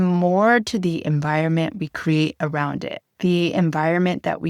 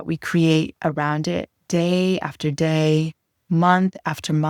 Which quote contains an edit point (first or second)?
first